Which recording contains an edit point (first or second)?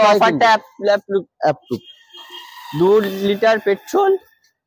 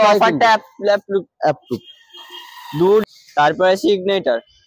second